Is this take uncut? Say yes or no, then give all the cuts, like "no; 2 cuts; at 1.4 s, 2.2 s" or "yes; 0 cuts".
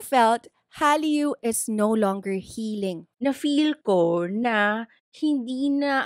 no; 1 cut; at 3.0 s